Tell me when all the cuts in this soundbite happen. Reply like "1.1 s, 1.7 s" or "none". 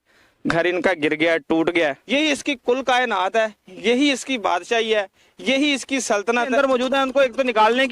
2.0 s, 6.5 s